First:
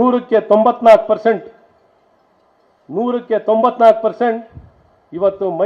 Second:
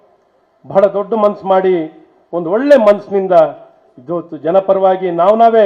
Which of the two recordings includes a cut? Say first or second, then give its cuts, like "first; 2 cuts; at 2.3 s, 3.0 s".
second; 1 cut; at 1.2 s